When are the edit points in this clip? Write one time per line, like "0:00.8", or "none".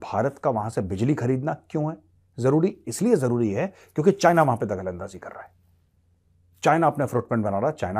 none